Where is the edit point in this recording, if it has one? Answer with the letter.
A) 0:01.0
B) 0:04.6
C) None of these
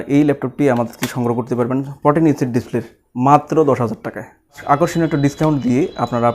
B